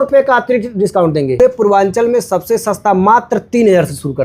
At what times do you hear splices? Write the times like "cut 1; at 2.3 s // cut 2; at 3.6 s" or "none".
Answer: cut 1; at 1.4 s